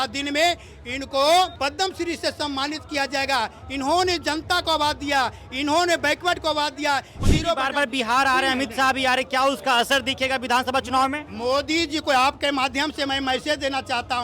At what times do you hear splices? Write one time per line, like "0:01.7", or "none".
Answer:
0:01.5
0:07.1